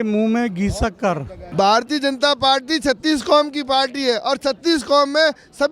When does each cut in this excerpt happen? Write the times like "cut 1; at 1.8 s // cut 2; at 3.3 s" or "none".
cut 1; at 1.4 s